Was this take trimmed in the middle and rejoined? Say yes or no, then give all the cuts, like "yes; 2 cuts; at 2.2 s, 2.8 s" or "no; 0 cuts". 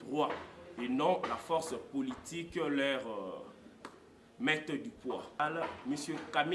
yes; 1 cut; at 5.4 s